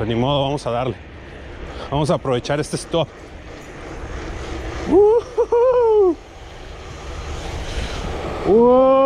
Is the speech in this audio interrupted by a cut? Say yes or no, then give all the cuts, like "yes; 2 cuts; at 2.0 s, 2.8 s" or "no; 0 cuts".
no; 0 cuts